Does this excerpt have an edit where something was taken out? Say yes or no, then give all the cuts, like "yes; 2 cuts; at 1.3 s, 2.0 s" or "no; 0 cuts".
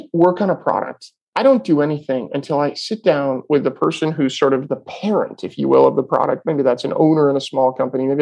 yes; 1 cut; at 4.6 s